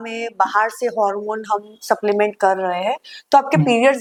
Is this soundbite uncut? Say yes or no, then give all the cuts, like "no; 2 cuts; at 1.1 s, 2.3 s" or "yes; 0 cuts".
yes; 0 cuts